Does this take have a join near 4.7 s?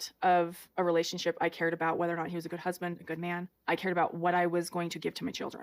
no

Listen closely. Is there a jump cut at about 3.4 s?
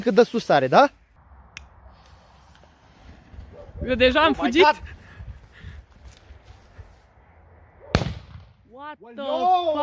no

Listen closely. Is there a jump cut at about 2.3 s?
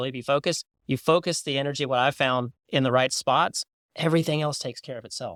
no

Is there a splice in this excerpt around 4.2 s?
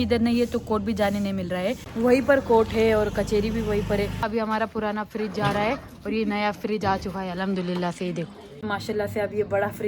yes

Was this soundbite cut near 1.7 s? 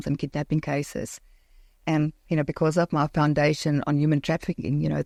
no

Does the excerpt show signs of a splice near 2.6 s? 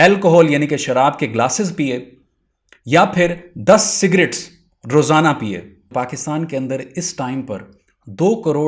no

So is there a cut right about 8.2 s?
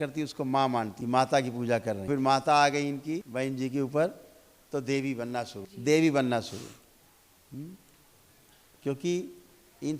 no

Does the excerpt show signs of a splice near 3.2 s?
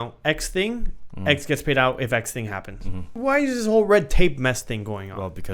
yes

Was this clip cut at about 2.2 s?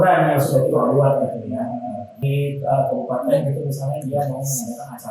yes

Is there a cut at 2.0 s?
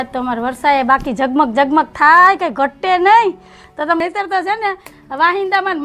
no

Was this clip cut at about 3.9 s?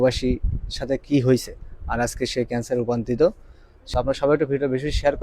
yes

